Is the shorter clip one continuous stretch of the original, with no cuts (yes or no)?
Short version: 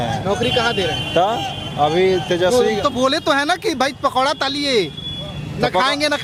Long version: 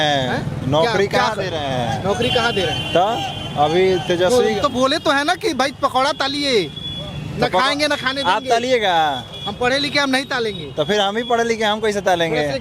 yes